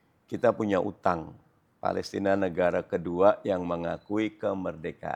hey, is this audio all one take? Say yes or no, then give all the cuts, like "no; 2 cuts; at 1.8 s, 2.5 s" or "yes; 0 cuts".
yes; 0 cuts